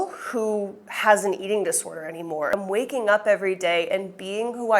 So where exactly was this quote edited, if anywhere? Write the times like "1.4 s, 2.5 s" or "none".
2.6 s